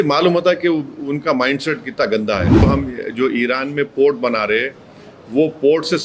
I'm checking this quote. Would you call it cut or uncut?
cut